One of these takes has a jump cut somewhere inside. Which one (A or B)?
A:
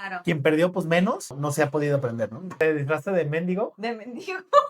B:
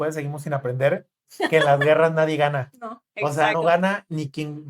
A